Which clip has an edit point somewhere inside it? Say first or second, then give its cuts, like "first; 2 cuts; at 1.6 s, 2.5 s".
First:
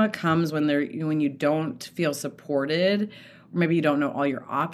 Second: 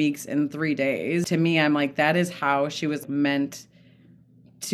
second; 2 cuts; at 1.3 s, 3.0 s